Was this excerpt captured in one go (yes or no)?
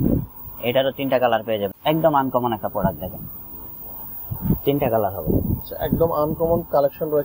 no